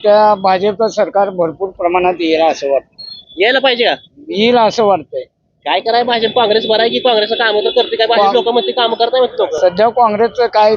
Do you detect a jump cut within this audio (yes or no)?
no